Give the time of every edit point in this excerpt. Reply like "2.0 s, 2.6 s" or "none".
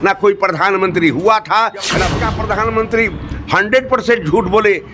2.2 s